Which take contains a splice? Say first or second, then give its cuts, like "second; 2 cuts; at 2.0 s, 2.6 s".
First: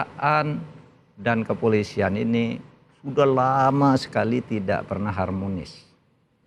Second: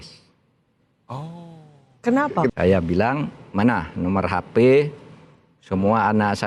second; 1 cut; at 2.5 s